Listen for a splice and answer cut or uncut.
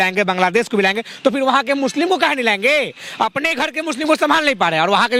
uncut